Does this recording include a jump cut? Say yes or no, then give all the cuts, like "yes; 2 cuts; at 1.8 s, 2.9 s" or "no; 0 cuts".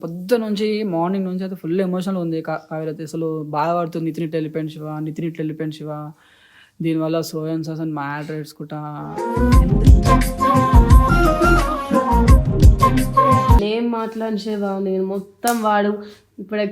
yes; 1 cut; at 13.6 s